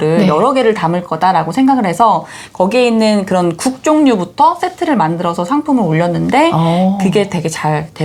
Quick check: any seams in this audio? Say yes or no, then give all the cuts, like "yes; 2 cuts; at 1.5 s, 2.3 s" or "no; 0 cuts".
no; 0 cuts